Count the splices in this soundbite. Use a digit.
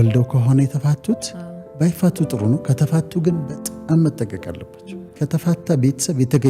1